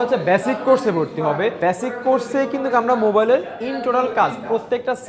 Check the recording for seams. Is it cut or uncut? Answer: cut